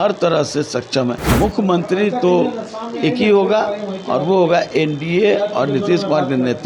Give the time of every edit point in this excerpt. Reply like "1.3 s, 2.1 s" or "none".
1.2 s